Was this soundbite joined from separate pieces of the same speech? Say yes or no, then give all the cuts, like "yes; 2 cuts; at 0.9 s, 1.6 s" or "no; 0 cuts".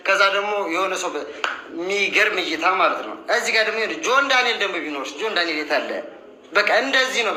no; 0 cuts